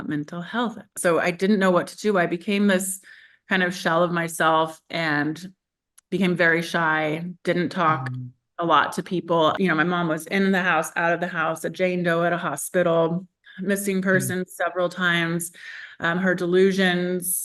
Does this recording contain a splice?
yes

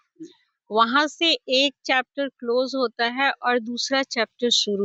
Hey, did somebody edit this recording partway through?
no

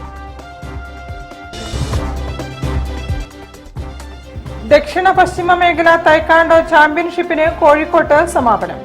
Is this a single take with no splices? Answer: yes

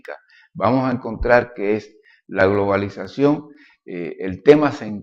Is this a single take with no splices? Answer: no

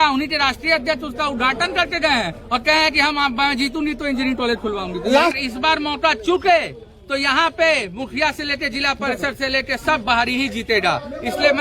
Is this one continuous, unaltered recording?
no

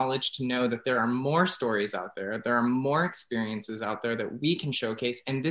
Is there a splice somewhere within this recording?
no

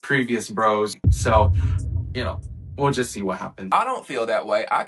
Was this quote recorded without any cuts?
no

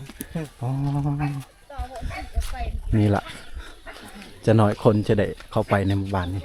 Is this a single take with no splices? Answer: yes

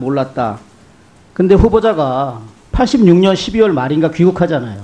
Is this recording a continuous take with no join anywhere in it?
yes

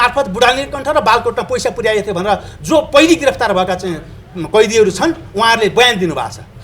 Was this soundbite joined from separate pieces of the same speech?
no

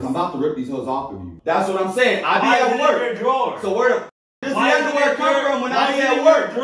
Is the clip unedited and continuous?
no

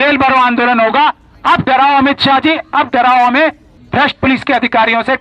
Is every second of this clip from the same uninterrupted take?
no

